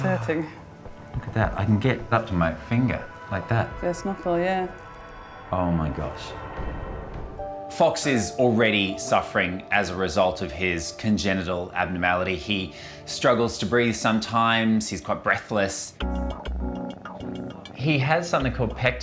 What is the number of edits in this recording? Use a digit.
0